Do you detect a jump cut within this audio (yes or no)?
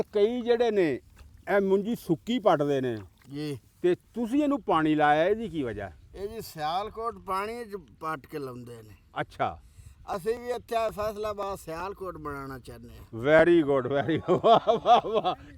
no